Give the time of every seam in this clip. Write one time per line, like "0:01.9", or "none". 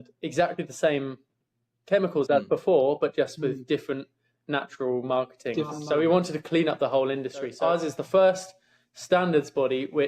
0:05.8
0:07.5